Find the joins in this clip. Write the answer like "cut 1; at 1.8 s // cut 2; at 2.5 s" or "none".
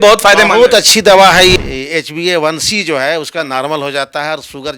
cut 1; at 1.5 s